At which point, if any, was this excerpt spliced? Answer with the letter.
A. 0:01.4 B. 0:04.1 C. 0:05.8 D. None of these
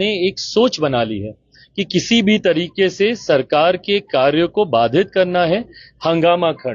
D